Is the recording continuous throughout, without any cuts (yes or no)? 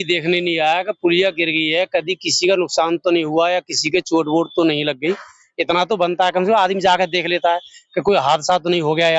yes